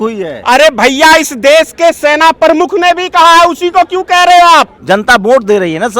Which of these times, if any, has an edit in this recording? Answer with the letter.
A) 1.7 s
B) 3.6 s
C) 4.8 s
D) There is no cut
C